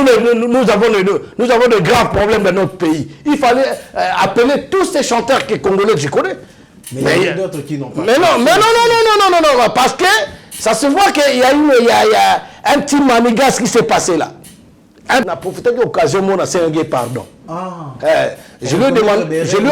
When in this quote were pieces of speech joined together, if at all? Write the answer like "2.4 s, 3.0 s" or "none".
15.3 s